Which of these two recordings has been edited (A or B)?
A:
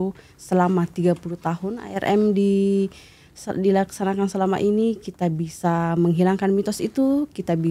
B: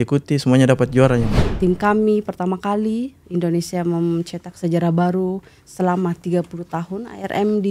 B